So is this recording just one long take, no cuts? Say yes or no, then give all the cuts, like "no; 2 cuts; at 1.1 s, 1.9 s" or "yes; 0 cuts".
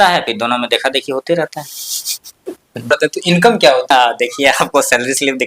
no; 2 cuts; at 2.9 s, 3.9 s